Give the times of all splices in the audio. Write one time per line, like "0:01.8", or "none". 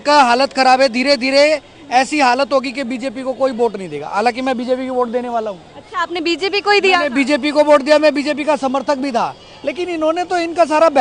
none